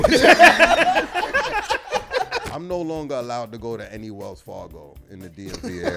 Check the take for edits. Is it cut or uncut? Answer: cut